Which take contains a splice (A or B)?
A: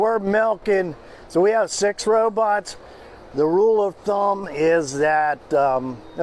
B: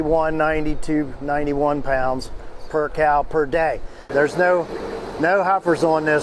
B